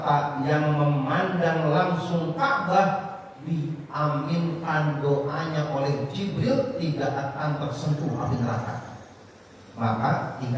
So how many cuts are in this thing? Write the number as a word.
zero